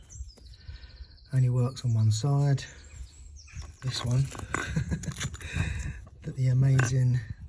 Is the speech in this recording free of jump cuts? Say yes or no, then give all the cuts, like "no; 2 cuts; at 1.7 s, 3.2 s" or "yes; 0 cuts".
no; 1 cut; at 3.7 s